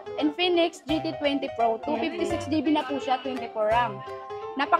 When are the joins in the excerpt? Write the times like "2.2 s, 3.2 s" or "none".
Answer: none